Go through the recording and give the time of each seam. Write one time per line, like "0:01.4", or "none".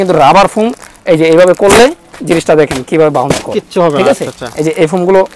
none